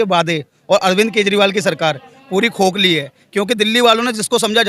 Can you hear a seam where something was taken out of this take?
no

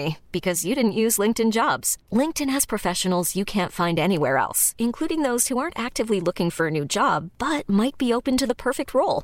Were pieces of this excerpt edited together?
no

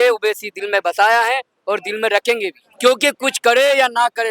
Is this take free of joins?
yes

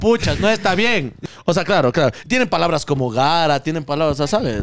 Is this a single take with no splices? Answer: no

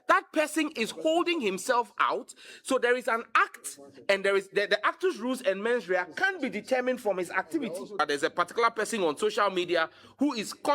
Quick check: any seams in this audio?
yes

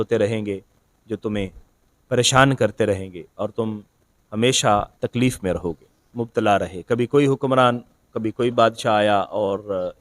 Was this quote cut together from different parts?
yes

